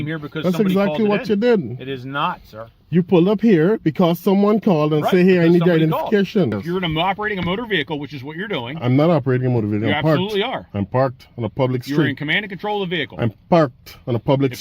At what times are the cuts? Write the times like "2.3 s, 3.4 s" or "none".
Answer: 6.6 s